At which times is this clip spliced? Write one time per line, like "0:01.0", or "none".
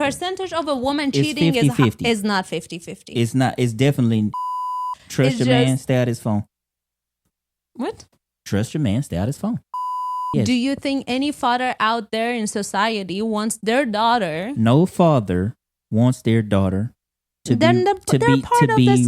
0:04.7
0:09.9